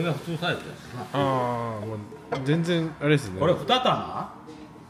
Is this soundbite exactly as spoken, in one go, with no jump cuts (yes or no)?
yes